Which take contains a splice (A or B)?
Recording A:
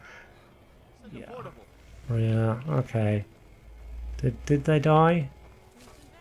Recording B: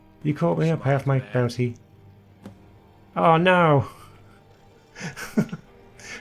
A